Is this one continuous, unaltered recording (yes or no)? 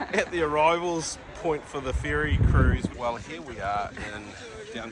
no